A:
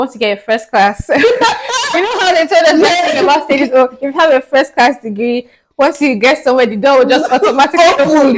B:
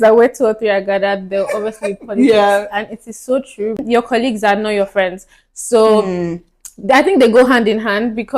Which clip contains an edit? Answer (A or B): B